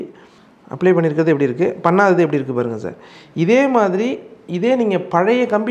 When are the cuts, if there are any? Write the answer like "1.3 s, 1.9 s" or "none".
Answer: none